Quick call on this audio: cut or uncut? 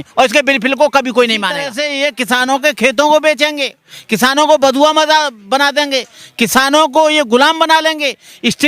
cut